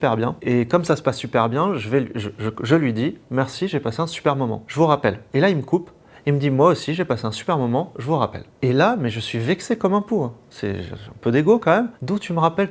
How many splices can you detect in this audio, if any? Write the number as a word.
zero